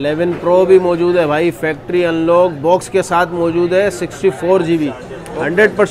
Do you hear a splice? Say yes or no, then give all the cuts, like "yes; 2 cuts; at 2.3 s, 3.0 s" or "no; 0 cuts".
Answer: no; 0 cuts